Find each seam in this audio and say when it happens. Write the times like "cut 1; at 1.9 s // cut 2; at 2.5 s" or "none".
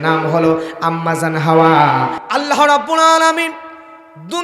cut 1; at 2.2 s